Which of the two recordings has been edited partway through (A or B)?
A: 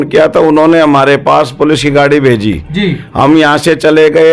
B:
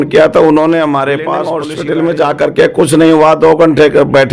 B